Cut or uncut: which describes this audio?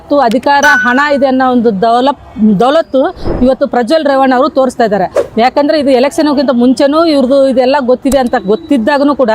uncut